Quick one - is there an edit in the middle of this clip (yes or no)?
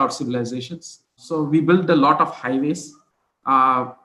yes